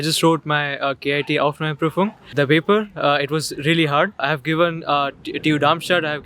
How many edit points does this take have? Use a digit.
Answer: 2